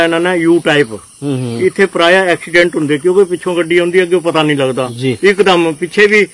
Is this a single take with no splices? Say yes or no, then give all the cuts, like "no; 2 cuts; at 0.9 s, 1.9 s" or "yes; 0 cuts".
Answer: yes; 0 cuts